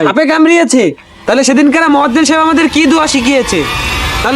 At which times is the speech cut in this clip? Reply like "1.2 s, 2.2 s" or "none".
none